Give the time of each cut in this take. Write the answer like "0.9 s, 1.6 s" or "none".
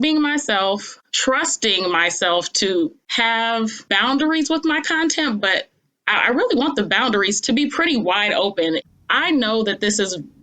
8.8 s